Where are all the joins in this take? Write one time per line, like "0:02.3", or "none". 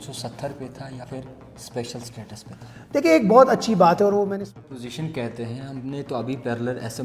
0:01.0
0:04.5